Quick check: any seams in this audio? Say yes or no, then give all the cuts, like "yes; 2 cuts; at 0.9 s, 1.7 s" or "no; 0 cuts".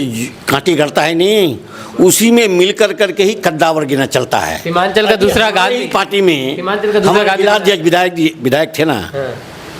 no; 0 cuts